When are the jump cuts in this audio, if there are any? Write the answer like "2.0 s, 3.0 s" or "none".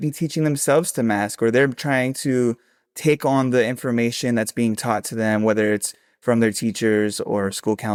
none